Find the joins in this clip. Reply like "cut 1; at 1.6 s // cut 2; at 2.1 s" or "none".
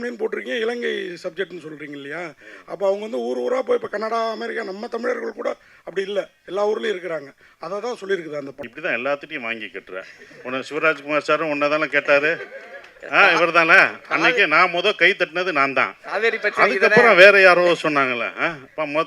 cut 1; at 8.6 s